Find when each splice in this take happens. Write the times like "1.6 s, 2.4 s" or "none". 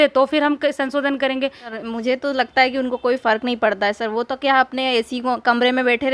1.6 s

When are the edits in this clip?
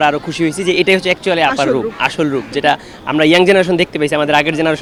none

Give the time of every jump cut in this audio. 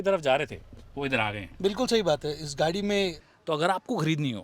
3.3 s

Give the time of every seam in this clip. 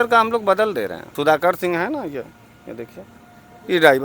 1.0 s

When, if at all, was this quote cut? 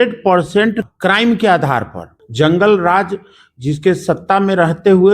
0.9 s, 2.2 s

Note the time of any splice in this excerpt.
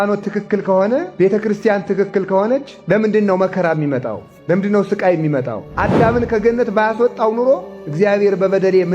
1.1 s, 5.6 s

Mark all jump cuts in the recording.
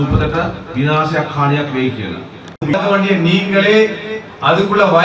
2.7 s

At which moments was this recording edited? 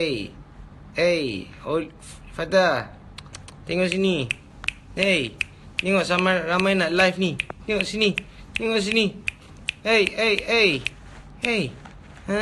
7.9 s

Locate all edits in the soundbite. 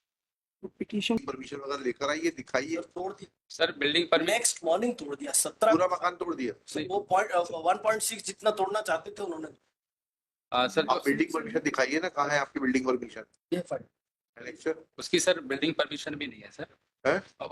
1.2 s

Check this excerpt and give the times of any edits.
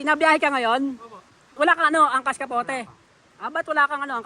1.4 s

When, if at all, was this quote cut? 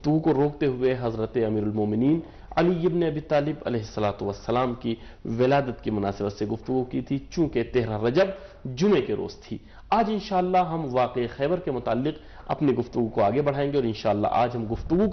3.3 s

